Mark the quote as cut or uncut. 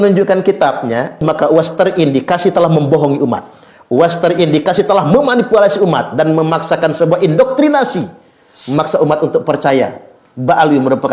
cut